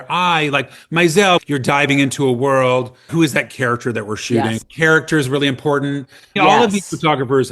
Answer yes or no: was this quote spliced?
yes